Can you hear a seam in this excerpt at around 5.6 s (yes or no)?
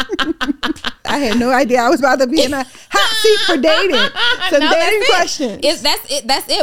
no